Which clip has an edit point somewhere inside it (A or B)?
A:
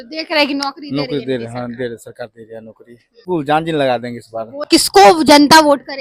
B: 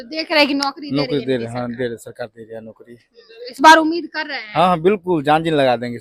A